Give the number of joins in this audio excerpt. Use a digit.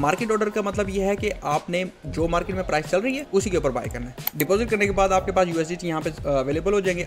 2